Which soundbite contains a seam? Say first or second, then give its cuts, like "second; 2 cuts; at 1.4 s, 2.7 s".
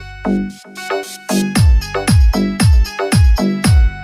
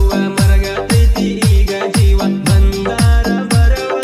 second; 2 cuts; at 0.8 s, 2.9 s